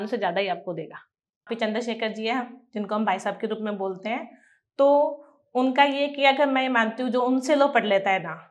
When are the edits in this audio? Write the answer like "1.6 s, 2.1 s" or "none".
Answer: 1.5 s